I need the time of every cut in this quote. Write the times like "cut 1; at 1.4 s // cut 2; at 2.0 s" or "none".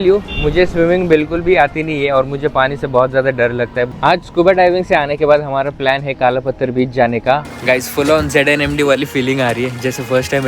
cut 1; at 3.8 s // cut 2; at 7.5 s